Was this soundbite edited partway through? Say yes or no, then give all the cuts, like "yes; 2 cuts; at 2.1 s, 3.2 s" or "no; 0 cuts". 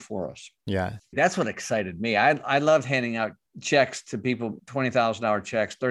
yes; 3 cuts; at 1.1 s, 3.5 s, 4.6 s